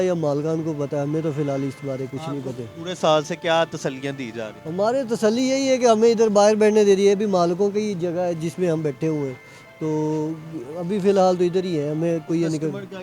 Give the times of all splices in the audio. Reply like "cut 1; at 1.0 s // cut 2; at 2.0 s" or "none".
none